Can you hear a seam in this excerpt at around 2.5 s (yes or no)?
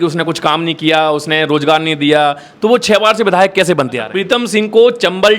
no